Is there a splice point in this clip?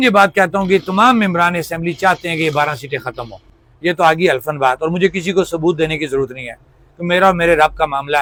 no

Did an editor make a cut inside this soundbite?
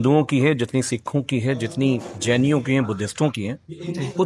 no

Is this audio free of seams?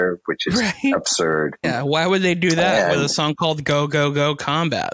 no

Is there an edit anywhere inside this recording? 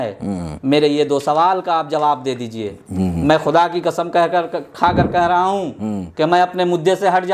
no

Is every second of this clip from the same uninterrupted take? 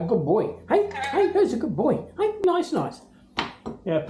no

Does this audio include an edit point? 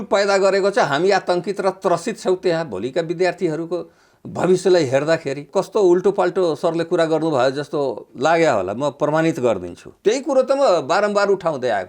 yes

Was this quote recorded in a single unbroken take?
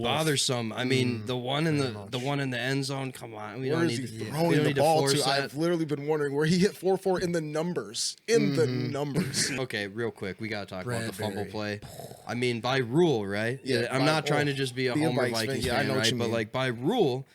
no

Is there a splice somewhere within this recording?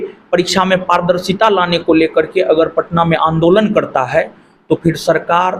no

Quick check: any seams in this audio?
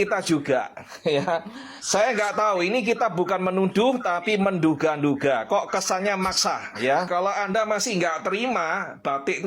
yes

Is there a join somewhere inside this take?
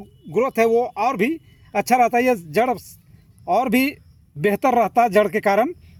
no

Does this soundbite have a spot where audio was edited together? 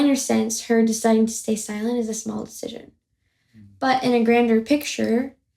no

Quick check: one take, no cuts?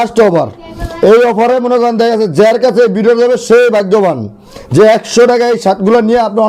yes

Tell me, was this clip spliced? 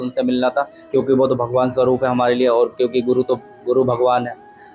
no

